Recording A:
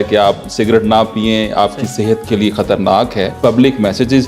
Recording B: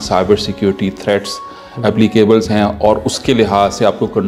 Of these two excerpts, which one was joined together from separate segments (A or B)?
A